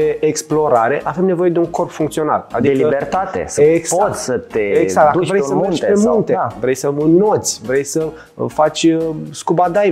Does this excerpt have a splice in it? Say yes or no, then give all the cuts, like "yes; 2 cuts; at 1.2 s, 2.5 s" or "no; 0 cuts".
no; 0 cuts